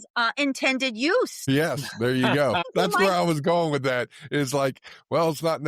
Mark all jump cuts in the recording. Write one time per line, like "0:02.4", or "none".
0:01.4
0:02.6